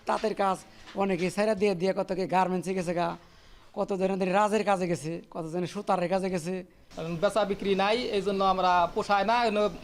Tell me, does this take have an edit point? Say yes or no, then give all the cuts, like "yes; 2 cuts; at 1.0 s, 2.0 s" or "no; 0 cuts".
no; 0 cuts